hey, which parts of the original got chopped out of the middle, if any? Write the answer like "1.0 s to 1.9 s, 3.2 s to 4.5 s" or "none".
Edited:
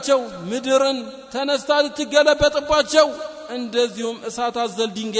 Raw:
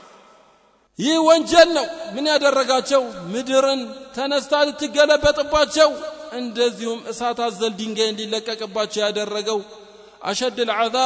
none